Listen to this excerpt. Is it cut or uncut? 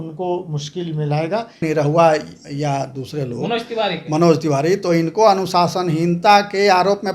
cut